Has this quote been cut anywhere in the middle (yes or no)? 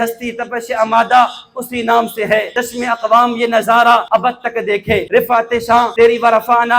yes